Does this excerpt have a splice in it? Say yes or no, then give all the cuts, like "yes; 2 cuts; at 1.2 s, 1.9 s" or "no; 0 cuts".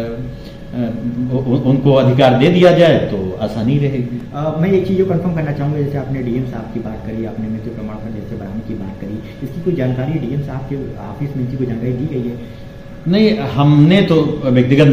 no; 0 cuts